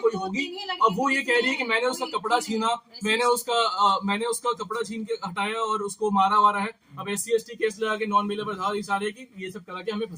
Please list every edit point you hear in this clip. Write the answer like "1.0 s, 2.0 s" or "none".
none